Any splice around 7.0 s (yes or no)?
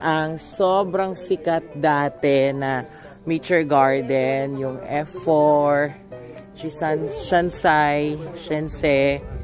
no